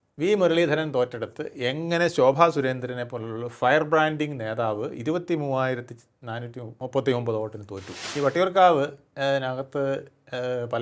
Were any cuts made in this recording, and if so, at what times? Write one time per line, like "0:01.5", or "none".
0:06.7
0:08.0